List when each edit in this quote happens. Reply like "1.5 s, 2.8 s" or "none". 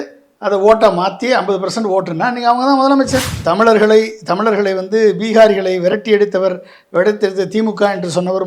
3.3 s